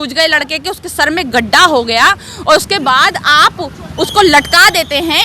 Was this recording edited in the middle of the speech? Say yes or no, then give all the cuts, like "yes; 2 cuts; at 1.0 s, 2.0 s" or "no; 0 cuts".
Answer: no; 0 cuts